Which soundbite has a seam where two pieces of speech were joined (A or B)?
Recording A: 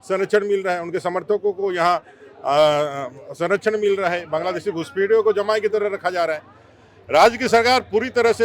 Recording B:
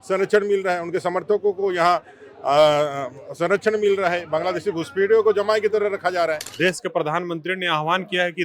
B